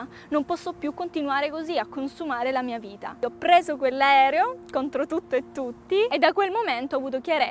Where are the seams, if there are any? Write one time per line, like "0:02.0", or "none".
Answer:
0:03.2
0:06.1